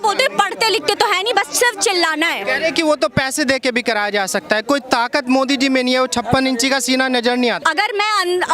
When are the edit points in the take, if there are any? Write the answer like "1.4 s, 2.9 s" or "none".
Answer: 7.6 s